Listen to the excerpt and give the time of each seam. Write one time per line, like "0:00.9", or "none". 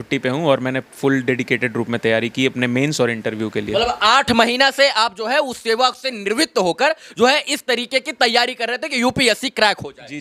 none